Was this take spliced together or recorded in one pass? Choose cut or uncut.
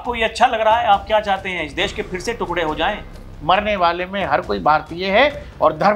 cut